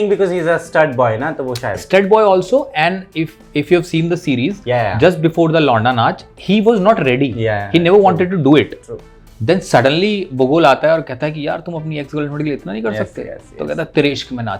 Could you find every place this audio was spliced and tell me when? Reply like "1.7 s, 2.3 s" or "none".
none

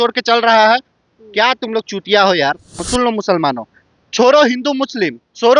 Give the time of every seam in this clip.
2.8 s

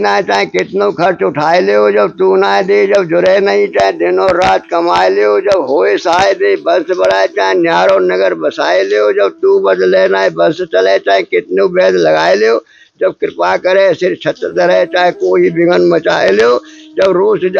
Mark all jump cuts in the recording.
none

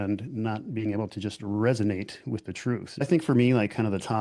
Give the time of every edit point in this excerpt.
3.0 s

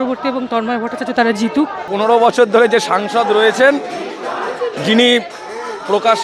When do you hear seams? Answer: 1.9 s

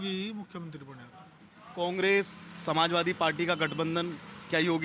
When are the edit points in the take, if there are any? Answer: none

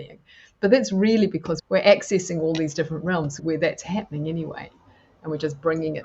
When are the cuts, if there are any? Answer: 1.5 s, 3.4 s

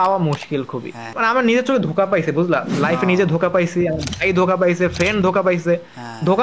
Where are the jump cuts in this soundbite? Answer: 1.1 s

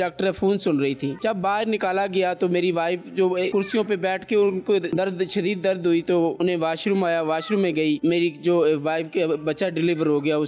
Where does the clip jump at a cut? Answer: none

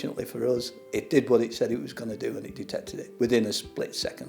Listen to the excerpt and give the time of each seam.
3.0 s

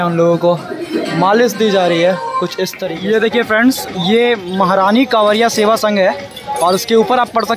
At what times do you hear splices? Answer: 2.8 s

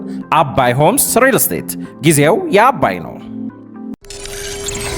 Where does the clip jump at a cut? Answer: 4.1 s

